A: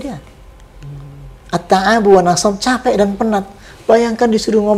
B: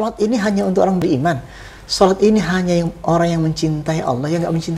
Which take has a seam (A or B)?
B